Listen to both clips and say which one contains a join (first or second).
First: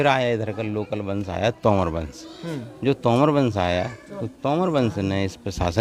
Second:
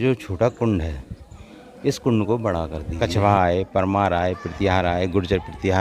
second